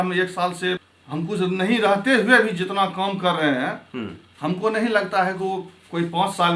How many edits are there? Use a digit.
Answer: 1